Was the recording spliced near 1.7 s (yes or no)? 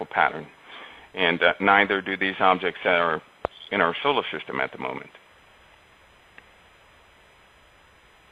yes